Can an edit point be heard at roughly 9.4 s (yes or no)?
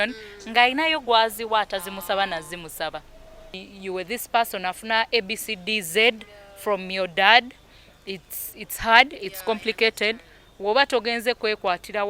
no